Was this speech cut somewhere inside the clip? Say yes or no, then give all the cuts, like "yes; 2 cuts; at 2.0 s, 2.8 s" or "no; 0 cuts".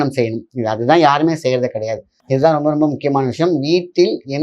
yes; 1 cut; at 2.1 s